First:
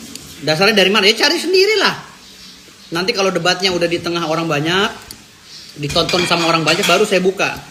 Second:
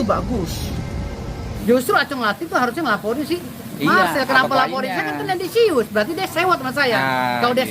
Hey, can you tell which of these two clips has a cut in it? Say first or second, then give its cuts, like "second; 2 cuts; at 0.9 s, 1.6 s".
second; 1 cut; at 1.4 s